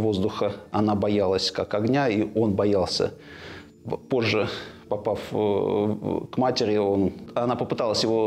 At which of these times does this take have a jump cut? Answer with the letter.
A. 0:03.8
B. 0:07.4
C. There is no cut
C